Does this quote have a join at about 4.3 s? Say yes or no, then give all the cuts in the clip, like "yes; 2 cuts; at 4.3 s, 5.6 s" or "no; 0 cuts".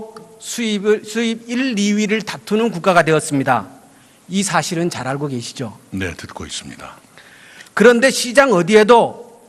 yes; 1 cut; at 4.3 s